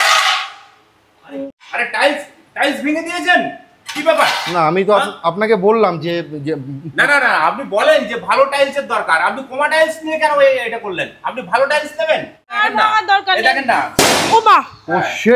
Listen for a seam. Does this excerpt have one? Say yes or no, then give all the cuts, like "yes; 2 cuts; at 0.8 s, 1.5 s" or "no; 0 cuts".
yes; 2 cuts; at 1.5 s, 12.6 s